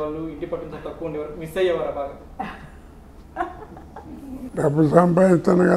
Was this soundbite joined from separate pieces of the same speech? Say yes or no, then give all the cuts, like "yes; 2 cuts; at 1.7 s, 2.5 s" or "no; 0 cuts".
yes; 1 cut; at 4.5 s